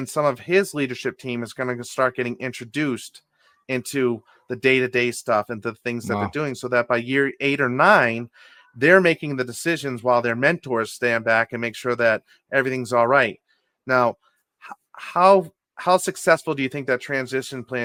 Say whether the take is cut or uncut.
uncut